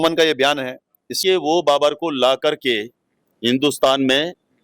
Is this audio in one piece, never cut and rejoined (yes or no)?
no